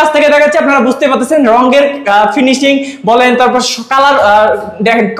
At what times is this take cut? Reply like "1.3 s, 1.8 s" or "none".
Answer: none